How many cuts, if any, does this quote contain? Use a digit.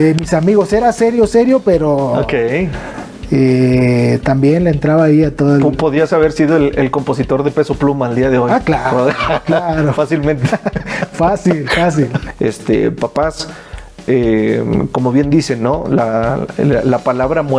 1